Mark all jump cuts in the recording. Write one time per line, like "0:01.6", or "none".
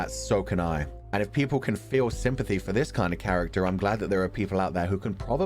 0:01.0